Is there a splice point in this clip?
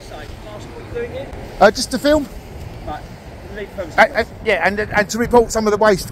no; 0 cuts

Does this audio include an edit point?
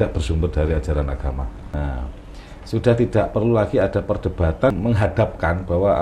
yes; 2 cuts; at 1.8 s, 4.7 s

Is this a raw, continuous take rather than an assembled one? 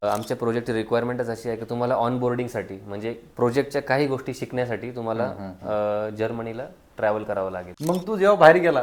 no; 1 cut; at 7.7 s

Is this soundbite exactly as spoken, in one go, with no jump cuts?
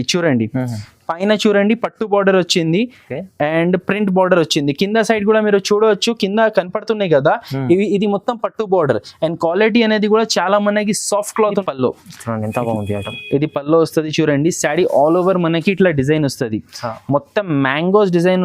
no; 1 cut; at 11.6 s

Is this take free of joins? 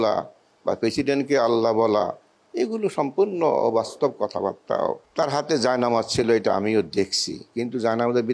no; 1 cut; at 5.0 s

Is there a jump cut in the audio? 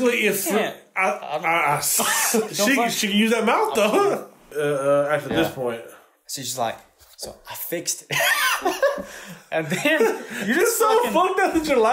yes; 1 cut; at 4.4 s

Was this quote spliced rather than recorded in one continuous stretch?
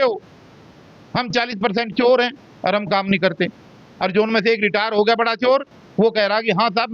no; 0 cuts

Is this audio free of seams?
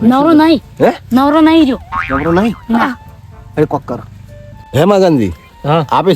no; 1 cut; at 4.6 s

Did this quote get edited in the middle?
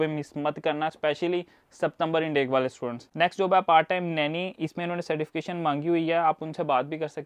no; 0 cuts

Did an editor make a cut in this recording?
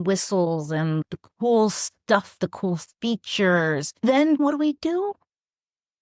yes; 2 cuts; at 1.0 s, 4.4 s

